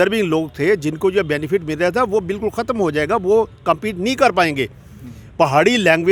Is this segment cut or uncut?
uncut